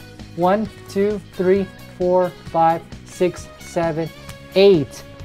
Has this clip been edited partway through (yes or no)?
no